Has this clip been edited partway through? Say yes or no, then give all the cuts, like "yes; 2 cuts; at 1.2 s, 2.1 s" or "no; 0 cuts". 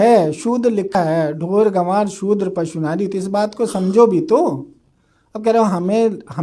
yes; 1 cut; at 1.0 s